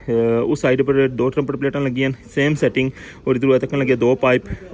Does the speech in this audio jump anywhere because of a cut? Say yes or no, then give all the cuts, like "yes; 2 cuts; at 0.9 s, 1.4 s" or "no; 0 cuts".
no; 0 cuts